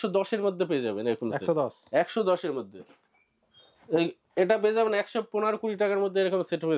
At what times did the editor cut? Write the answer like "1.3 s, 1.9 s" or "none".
none